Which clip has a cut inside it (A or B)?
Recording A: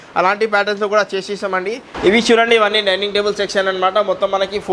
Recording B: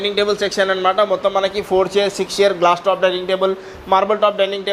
A